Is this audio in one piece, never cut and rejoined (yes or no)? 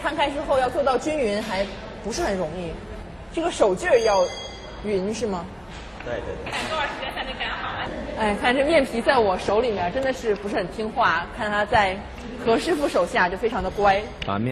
yes